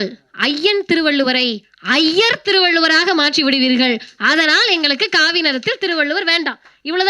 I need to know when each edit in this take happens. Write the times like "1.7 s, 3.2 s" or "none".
none